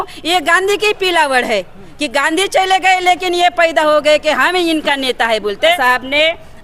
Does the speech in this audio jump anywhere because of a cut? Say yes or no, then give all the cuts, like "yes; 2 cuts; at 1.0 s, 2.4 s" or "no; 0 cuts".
yes; 1 cut; at 5.7 s